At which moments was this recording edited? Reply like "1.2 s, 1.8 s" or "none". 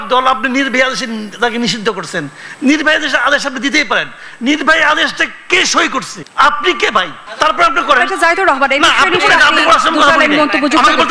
6.2 s, 7.2 s